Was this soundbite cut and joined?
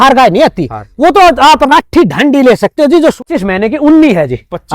yes; 1 cut; at 3.2 s

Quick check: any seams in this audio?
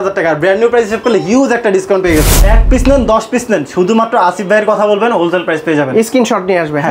yes; 1 cut; at 2.4 s

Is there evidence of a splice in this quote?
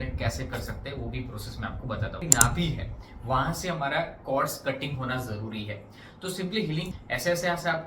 yes; 2 cuts; at 2.2 s, 6.9 s

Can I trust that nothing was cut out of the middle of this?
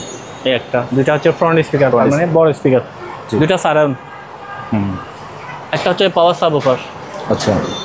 yes; 0 cuts

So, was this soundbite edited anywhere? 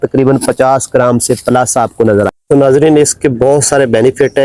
yes; 1 cut; at 2.3 s

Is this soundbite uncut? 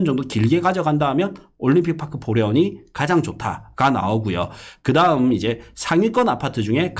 yes; 0 cuts

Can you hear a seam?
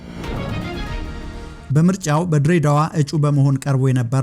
yes; 1 cut; at 1.5 s

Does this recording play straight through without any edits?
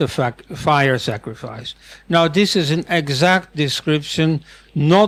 yes; 0 cuts

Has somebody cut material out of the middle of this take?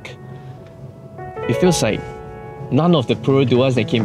yes; 1 cut; at 1.3 s

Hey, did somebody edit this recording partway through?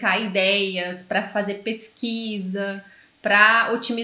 no; 0 cuts

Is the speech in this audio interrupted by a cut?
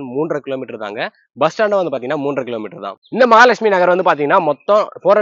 no; 0 cuts

